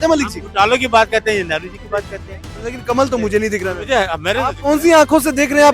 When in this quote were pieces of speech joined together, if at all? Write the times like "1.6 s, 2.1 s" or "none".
2.7 s